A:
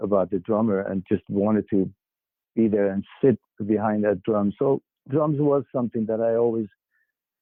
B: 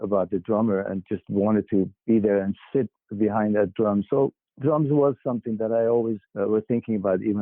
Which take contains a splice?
B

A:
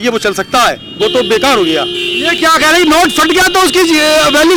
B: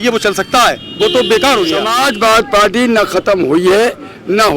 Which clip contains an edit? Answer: B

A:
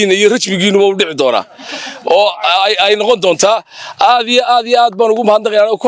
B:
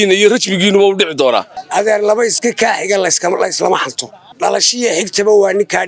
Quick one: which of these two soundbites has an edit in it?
B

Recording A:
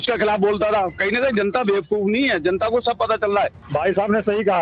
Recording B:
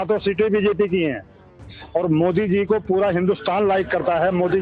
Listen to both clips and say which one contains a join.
A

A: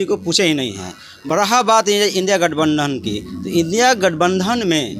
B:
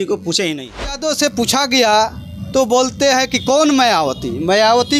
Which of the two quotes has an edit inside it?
B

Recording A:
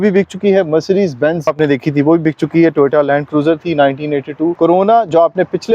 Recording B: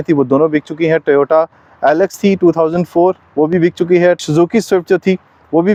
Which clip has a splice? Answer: A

